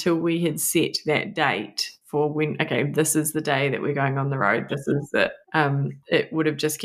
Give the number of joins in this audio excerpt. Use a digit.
1